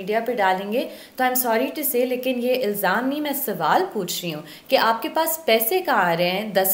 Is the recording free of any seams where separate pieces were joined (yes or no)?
yes